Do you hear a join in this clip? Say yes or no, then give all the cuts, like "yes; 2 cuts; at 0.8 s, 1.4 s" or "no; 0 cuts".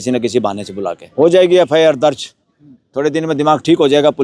yes; 1 cut; at 1.0 s